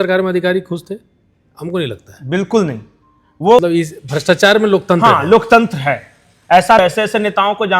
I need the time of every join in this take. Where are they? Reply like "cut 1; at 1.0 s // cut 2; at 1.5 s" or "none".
cut 1; at 3.6 s // cut 2; at 6.8 s